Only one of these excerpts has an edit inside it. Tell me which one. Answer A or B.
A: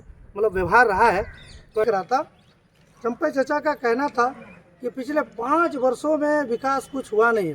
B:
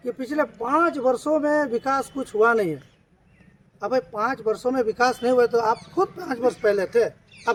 A